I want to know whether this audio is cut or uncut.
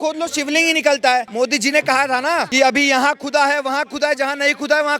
uncut